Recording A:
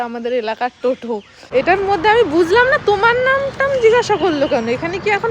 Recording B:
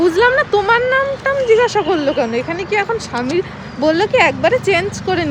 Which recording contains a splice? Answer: A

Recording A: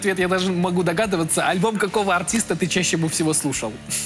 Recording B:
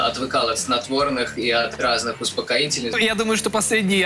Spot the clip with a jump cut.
B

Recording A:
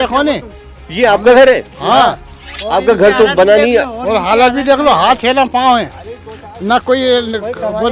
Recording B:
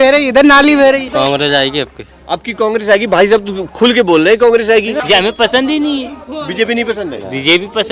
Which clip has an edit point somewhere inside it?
B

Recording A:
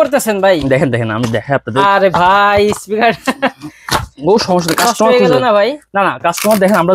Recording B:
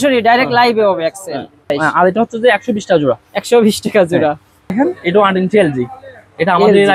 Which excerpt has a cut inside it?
B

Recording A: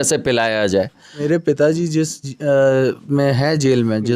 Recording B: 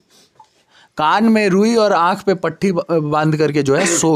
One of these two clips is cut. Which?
A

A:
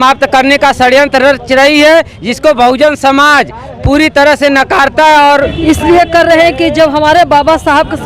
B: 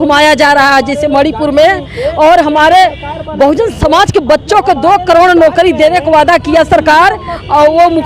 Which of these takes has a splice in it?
A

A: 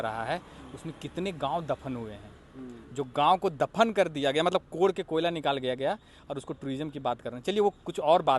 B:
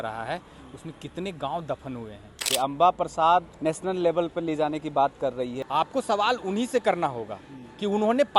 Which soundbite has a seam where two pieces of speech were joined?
B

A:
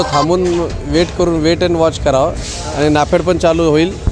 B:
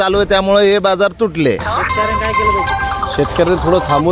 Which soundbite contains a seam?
B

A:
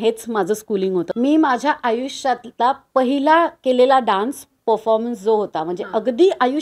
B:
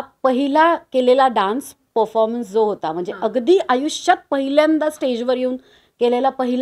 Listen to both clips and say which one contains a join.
A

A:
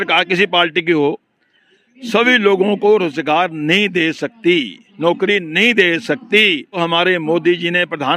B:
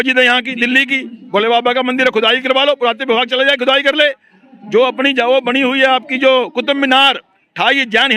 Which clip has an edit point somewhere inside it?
A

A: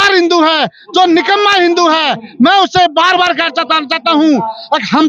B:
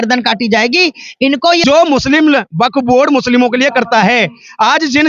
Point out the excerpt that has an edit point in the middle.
B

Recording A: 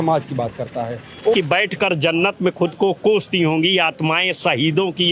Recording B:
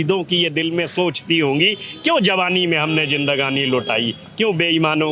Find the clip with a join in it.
A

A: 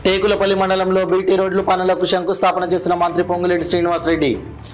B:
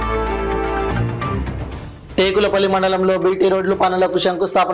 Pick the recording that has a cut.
B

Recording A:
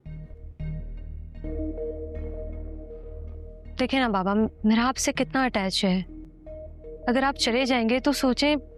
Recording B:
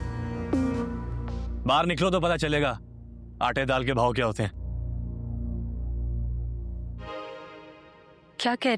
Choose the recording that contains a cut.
B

